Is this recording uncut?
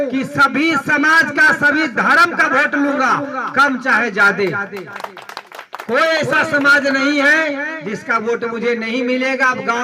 yes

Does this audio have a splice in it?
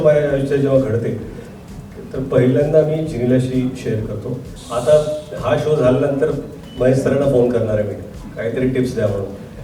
yes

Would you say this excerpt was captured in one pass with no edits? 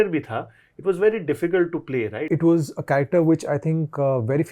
no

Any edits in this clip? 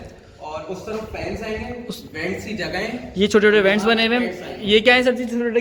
no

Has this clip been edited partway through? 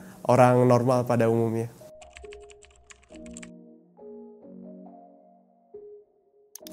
no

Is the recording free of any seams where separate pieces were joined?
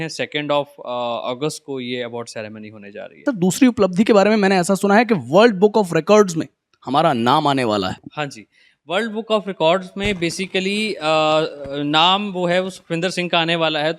no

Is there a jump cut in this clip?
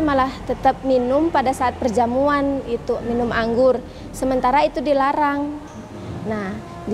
no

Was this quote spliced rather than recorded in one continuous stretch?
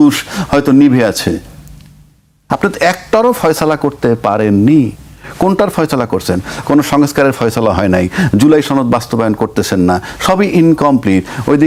no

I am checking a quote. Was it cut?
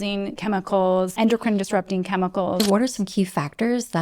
yes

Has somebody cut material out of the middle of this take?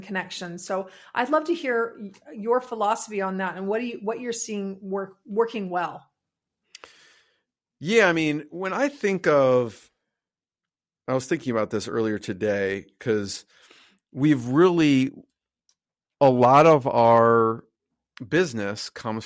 no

